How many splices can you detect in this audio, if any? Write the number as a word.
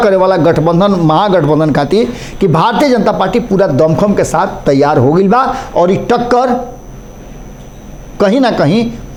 zero